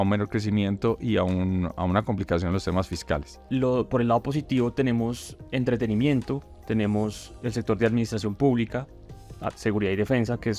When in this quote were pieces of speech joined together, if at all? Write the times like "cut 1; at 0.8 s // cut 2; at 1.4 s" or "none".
cut 1; at 3.3 s